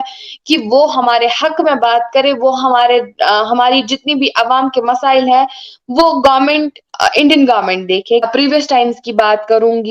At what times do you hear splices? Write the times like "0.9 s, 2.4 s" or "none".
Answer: 8.3 s